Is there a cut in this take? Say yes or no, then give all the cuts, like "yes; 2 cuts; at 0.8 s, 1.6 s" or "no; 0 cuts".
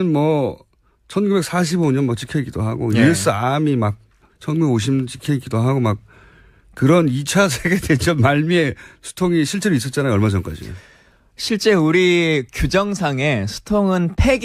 no; 0 cuts